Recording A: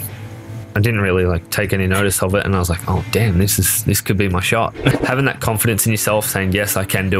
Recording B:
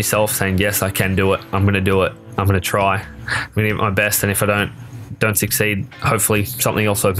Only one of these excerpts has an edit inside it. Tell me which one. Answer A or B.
A